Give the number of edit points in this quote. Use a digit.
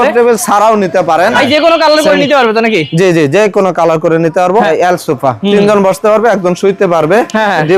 2